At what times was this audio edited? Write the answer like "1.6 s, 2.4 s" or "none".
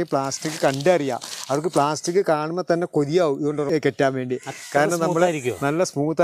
3.7 s